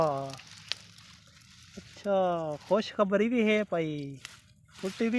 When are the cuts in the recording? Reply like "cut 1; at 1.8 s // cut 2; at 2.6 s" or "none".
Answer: none